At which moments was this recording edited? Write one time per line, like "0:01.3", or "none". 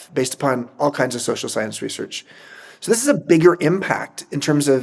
none